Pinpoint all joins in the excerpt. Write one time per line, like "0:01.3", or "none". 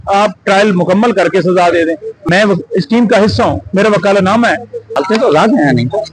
0:02.2
0:04.9